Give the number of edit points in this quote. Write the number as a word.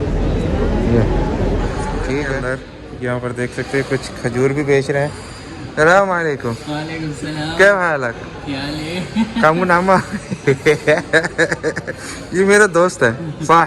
one